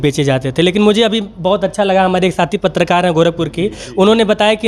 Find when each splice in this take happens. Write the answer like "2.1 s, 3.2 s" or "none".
none